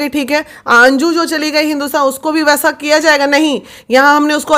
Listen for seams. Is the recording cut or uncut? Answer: uncut